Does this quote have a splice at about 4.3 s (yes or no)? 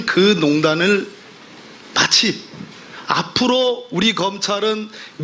yes